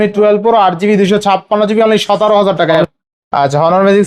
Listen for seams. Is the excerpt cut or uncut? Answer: cut